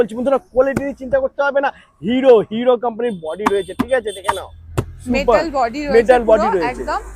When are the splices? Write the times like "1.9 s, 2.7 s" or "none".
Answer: none